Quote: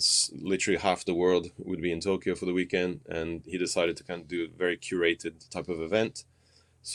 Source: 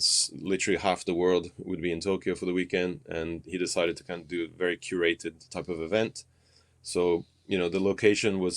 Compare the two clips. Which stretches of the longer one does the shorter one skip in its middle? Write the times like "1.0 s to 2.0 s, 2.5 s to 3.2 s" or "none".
none